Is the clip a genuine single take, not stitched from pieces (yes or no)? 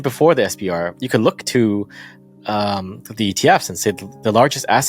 yes